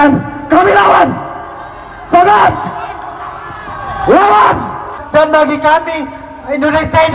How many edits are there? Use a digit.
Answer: 1